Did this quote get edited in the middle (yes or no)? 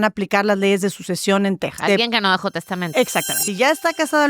yes